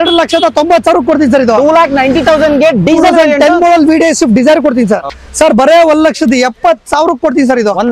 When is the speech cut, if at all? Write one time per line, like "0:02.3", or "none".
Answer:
0:05.1